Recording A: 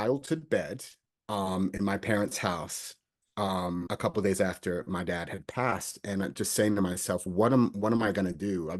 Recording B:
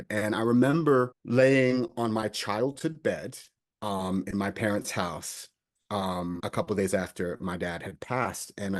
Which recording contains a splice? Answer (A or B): B